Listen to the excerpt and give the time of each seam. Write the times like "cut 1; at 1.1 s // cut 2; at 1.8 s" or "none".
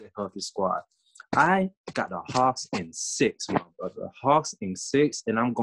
none